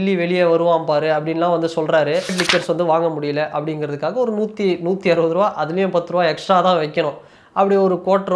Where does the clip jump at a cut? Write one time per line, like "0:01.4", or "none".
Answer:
0:02.3